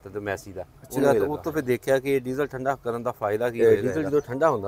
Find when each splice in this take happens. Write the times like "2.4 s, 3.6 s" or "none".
1.0 s, 3.6 s

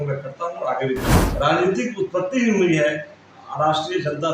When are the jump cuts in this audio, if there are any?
1.2 s

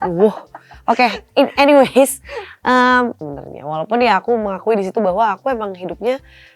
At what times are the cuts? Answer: 3.2 s

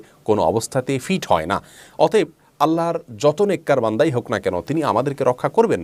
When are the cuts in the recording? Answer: none

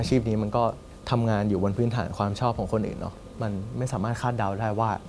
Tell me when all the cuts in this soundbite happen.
0.9 s

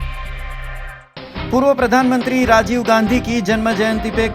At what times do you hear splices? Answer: 0.9 s

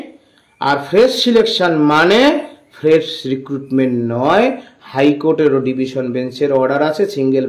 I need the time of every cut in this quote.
none

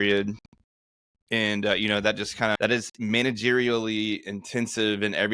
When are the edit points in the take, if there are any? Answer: 2.6 s

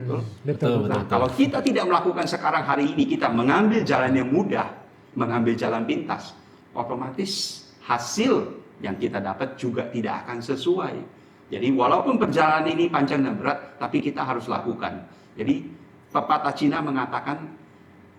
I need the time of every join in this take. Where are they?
none

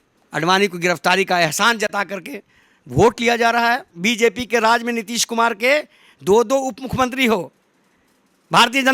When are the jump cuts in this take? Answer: 3.9 s

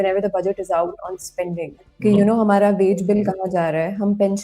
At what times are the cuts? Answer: 1.8 s

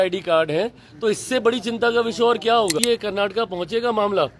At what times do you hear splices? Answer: 2.8 s

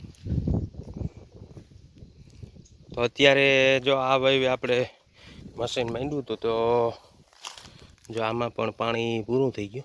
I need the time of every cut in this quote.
none

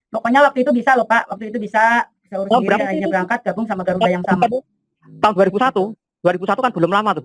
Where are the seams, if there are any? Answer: none

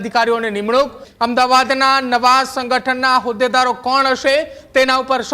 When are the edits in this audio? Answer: 1.0 s

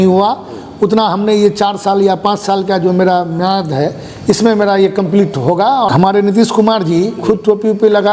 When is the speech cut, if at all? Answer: 5.9 s

